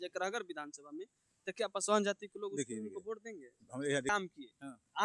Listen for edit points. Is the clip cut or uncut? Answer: cut